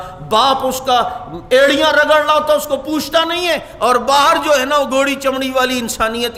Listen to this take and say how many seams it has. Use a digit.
0